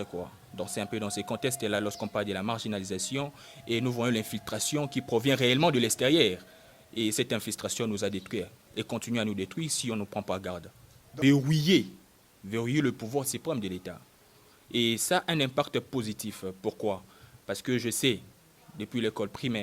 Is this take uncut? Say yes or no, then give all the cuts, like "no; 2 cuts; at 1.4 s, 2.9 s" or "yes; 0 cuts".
no; 1 cut; at 11.1 s